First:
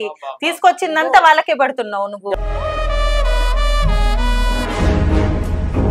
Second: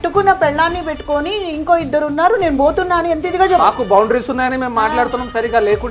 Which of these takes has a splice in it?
second; 1 cut; at 3.6 s

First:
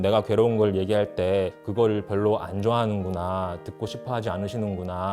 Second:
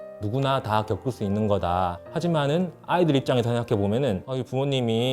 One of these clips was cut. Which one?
second; 2 cuts; at 2.0 s, 4.3 s

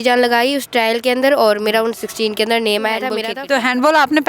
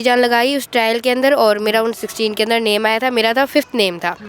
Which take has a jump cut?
first; 1 cut; at 3.2 s

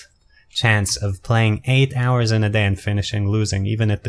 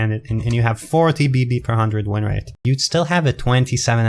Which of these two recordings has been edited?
second; 1 cut; at 2.5 s

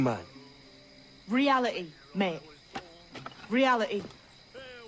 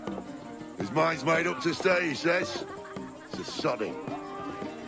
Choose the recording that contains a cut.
first; 1 cut; at 3.9 s

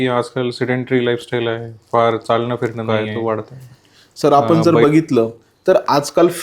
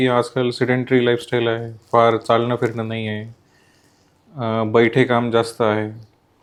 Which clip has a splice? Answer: first; 1 cut; at 2.8 s

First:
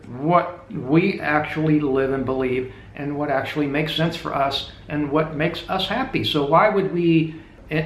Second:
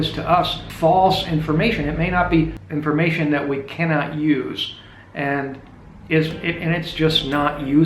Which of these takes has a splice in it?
second; 1 cut; at 2.6 s

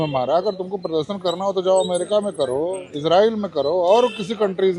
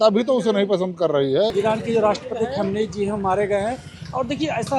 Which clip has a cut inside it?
second; 1 cut; at 1.5 s

